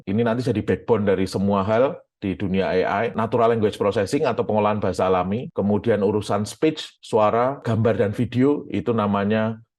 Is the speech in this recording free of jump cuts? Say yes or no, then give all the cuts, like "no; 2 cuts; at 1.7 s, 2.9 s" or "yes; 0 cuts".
yes; 0 cuts